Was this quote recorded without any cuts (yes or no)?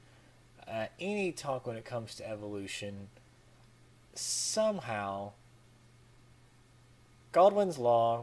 no